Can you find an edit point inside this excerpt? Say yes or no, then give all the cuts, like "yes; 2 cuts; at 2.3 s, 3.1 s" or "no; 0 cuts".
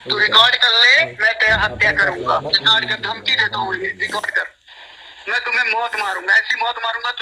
no; 0 cuts